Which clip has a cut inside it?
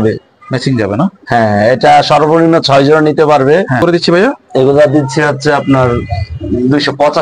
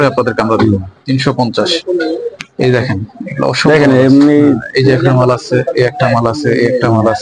first; 1 cut; at 3.8 s

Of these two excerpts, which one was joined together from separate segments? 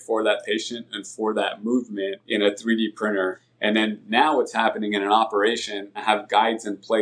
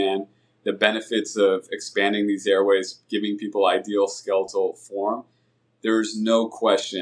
first; 3 cuts; at 2.2 s, 3.4 s, 6.0 s

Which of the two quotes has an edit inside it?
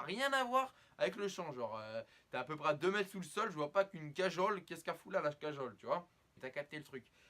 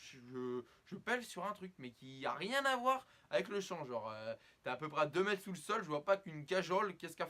first; 1 cut; at 6.4 s

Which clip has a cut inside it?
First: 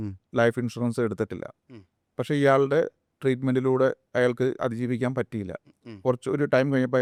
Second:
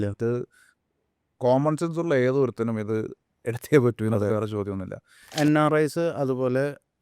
second; 1 cut; at 5.3 s

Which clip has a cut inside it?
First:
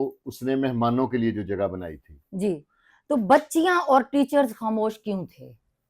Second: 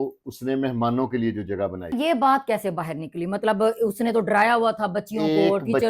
second; 1 cut; at 1.9 s

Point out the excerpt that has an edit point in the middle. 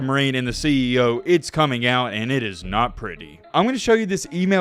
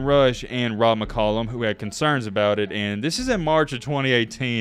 first; 1 cut; at 3.4 s

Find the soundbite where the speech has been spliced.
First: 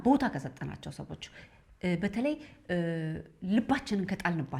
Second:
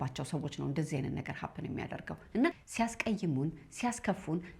second; 1 cut; at 2.6 s

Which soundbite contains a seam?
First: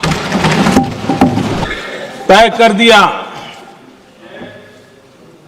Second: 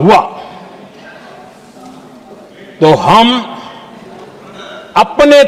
first; 1 cut; at 1.6 s

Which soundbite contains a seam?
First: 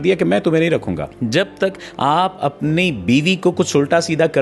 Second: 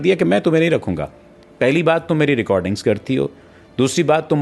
first; 1 cut; at 1.1 s

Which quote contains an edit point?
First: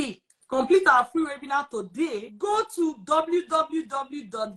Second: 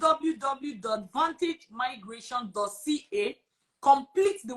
first; 1 cut; at 2.3 s

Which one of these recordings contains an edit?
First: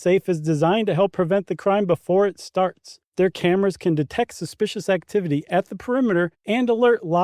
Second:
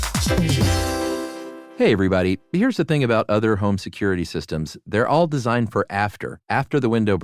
second; 1 cut; at 1.6 s

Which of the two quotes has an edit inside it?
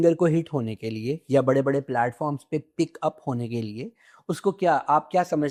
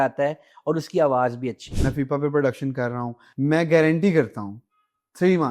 second; 2 cuts; at 1.6 s, 3.4 s

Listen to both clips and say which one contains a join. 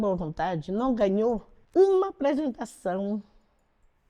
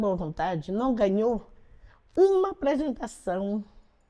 first; 1 cut; at 1.5 s

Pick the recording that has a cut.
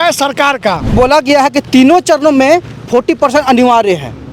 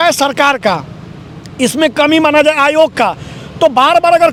first; 1 cut; at 0.9 s

